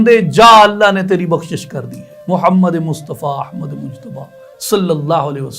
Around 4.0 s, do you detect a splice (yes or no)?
no